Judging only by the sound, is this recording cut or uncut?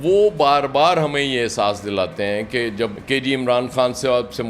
cut